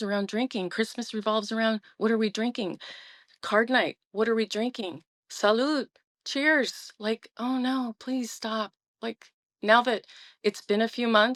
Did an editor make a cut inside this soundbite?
no; 0 cuts

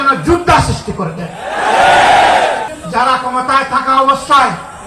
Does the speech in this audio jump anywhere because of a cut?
yes; 1 cut; at 2.8 s

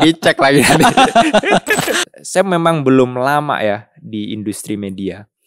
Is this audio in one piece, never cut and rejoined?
no; 1 cut; at 1.9 s

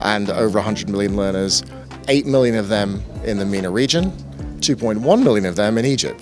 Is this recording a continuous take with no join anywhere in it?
yes; 0 cuts

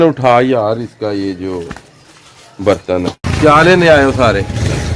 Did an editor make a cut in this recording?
yes; 1 cut; at 3.3 s

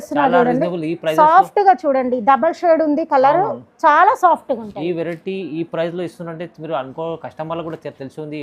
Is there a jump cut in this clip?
no; 0 cuts

